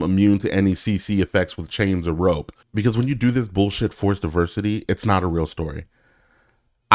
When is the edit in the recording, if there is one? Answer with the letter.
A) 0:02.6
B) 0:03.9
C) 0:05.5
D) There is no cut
A